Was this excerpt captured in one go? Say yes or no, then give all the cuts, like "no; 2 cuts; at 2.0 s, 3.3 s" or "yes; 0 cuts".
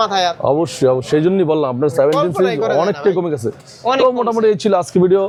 yes; 0 cuts